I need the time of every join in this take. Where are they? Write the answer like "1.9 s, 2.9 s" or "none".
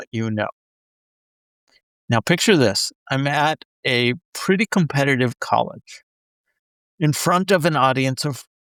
none